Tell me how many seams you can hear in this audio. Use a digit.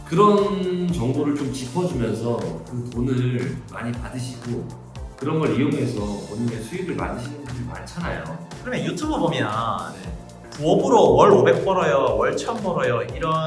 1